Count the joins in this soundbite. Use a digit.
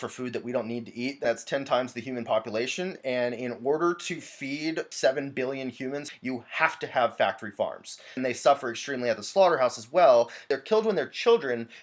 5